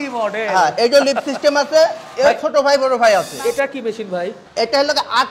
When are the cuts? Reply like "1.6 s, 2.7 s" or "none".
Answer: 3.3 s, 4.4 s